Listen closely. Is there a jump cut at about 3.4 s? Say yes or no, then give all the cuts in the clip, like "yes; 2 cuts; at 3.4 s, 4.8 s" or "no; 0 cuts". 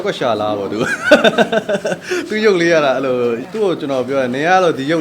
yes; 1 cut; at 3.4 s